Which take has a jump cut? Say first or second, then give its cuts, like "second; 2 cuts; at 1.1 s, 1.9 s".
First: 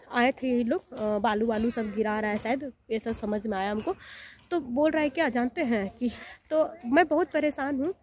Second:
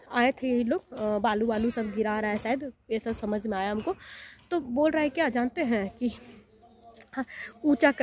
first; 1 cut; at 6.3 s